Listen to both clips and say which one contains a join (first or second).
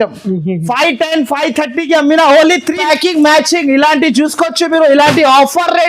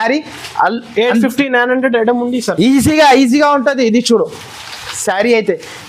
first